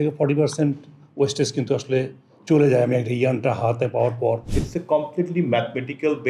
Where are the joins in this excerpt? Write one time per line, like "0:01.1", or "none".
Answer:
0:04.4